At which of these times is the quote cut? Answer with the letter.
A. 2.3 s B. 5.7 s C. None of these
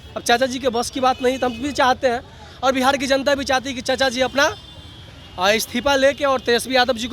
C